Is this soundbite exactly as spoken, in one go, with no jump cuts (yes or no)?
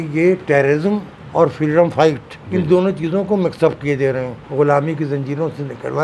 no